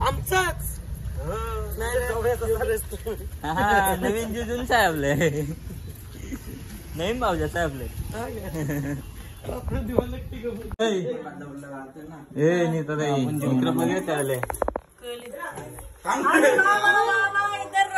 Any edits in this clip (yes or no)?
yes